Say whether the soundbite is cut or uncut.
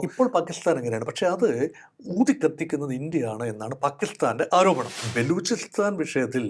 cut